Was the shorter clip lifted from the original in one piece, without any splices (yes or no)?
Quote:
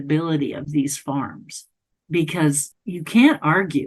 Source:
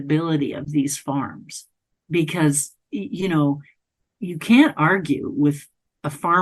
no